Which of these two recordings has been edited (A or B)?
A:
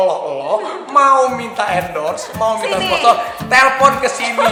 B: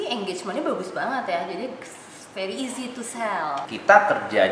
B